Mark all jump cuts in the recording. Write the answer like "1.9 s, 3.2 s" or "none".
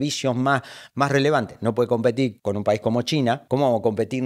2.4 s, 3.4 s